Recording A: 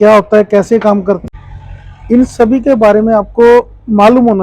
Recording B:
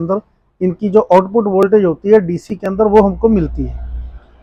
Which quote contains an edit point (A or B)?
A